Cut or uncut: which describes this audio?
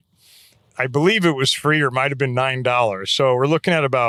uncut